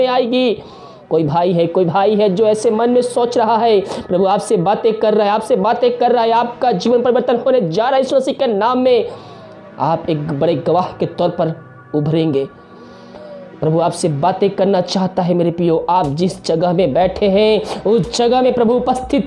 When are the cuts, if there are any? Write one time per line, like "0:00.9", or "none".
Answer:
none